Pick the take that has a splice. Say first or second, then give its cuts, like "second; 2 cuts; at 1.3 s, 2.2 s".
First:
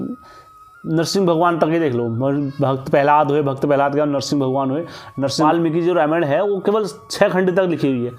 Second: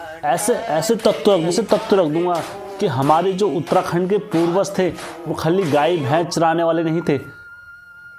first; 1 cut; at 5.5 s